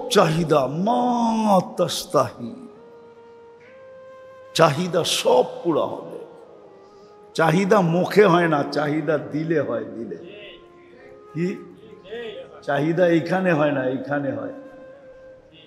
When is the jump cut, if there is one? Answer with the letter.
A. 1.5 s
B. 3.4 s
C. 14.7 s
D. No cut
D